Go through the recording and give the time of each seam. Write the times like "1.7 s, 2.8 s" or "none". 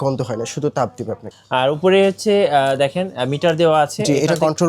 1.3 s